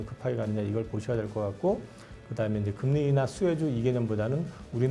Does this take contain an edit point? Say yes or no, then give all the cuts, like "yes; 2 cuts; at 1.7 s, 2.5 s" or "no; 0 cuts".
no; 0 cuts